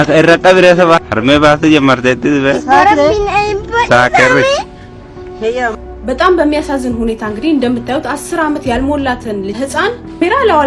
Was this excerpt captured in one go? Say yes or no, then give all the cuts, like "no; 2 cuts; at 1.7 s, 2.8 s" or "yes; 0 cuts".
no; 1 cut; at 1.1 s